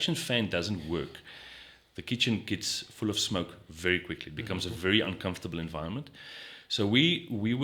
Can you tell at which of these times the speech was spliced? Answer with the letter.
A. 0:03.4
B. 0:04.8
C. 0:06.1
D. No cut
D